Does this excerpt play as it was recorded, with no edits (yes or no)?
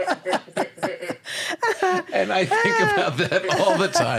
yes